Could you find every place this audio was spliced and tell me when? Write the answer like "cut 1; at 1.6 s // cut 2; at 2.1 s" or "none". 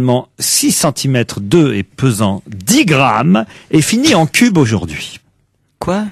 cut 1; at 2.3 s